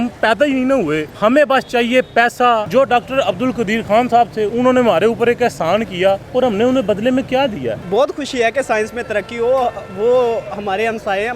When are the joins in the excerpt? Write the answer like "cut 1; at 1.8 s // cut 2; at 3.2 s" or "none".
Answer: cut 1; at 1.1 s // cut 2; at 2.7 s // cut 3; at 6.2 s // cut 4; at 7.8 s